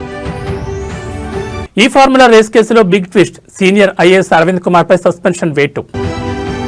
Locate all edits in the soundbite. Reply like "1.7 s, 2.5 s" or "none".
none